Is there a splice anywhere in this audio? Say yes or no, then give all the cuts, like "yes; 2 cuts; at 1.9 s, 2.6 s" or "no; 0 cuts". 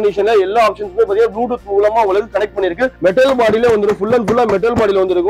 yes; 1 cut; at 3.0 s